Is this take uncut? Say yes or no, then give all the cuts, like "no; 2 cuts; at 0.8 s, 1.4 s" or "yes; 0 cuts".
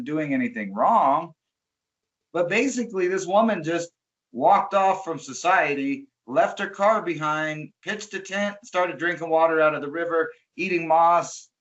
yes; 0 cuts